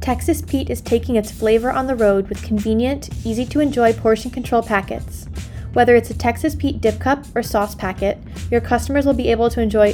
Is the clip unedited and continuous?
yes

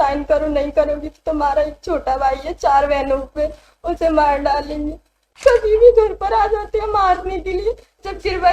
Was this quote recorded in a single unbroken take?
no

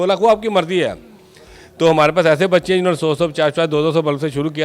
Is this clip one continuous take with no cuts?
yes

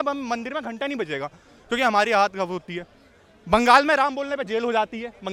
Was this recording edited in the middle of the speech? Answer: no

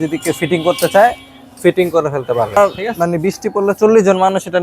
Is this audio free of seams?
no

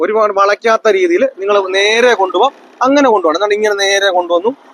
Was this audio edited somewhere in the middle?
no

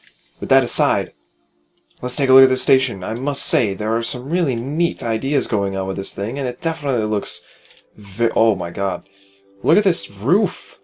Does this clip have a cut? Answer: yes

